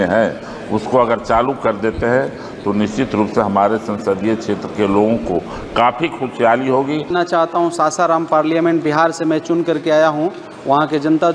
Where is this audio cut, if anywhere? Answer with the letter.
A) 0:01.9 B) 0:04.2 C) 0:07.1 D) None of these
C